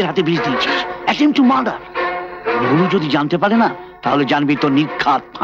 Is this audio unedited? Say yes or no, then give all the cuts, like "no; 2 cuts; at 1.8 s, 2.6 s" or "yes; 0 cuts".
yes; 0 cuts